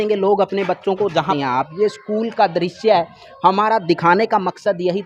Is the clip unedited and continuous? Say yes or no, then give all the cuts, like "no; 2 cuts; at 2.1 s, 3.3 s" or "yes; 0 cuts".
no; 1 cut; at 1.3 s